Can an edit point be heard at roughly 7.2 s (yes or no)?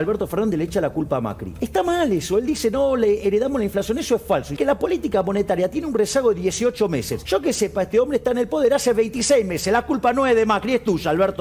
yes